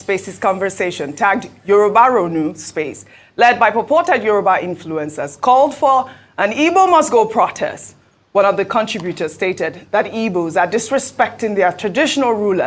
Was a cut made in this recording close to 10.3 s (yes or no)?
yes